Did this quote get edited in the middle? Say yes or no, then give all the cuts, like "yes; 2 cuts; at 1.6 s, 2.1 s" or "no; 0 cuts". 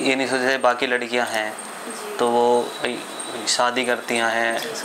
no; 0 cuts